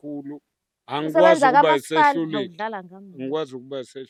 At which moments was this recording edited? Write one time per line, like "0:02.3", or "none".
none